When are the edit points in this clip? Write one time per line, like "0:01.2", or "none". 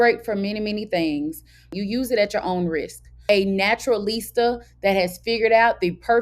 0:01.7
0:03.2